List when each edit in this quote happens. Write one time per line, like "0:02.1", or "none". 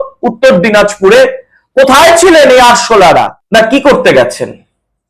0:03.4